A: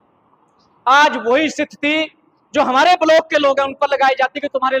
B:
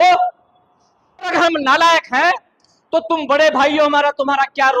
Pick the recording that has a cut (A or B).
B